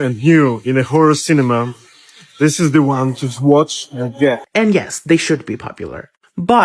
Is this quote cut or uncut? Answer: cut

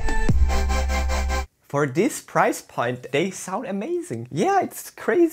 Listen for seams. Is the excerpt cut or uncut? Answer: cut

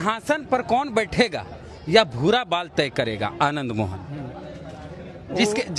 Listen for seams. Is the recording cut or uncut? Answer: uncut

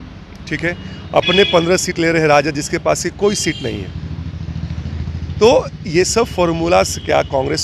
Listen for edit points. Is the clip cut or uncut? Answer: uncut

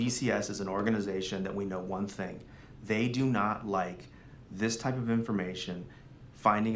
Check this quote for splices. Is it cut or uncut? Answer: uncut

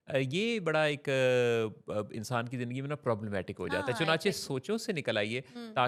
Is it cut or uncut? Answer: uncut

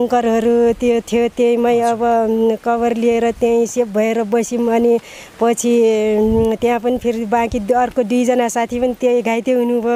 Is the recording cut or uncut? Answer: uncut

